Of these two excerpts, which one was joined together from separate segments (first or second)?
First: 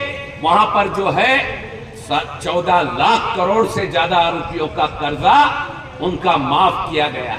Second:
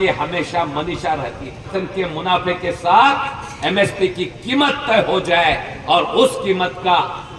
second